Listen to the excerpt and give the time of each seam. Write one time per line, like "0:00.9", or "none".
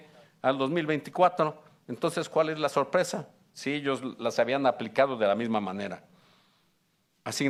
none